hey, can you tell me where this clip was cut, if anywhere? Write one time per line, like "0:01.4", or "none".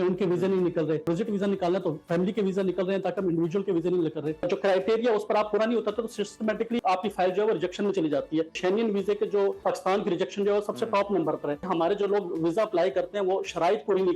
0:01.1
0:04.5
0:06.8
0:08.5
0:09.6
0:11.6